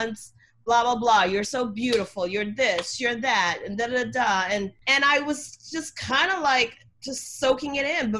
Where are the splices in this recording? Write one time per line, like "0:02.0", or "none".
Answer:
none